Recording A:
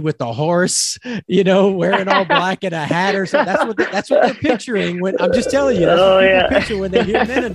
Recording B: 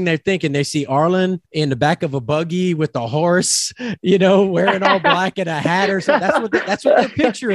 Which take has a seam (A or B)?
B